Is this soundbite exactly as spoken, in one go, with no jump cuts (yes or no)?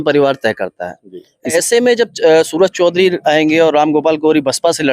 no